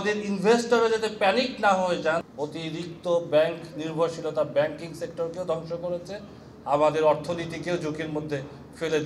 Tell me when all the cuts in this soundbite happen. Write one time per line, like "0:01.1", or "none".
0:02.4